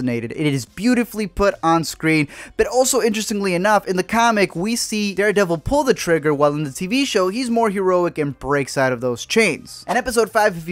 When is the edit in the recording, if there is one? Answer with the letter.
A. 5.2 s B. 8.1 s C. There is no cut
A